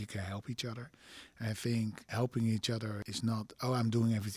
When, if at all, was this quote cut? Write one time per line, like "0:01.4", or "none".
0:02.0
0:03.0